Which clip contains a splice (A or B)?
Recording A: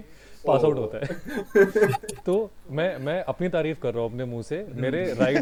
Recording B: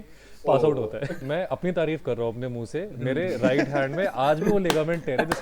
B